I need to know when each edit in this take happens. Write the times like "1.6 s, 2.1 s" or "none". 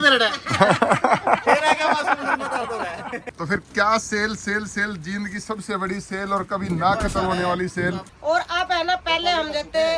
3.2 s, 8.1 s